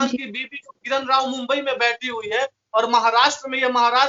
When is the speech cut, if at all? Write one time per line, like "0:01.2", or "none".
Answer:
none

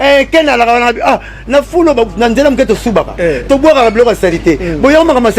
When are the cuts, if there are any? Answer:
none

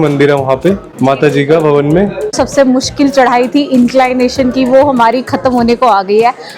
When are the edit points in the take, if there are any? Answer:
0:00.9
0:02.3

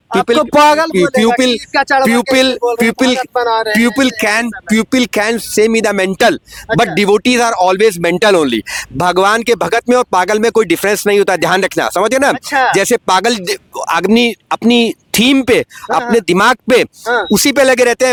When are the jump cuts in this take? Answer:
none

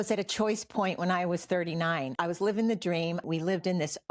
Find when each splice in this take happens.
0:02.1
0:03.2

